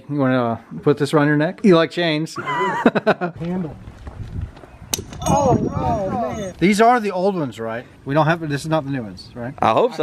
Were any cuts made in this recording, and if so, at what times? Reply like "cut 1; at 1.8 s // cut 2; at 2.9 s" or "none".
cut 1; at 3.4 s // cut 2; at 6.5 s // cut 3; at 7.9 s